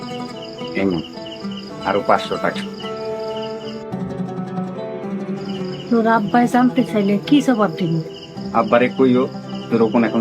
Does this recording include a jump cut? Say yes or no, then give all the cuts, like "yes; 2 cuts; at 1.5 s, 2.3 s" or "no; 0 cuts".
no; 0 cuts